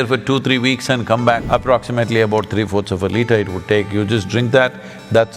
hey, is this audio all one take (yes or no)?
no